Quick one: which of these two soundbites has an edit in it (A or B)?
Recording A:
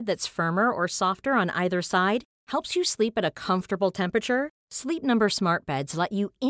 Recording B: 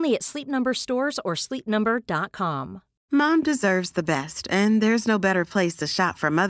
B